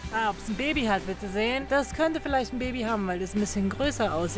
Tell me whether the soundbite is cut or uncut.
cut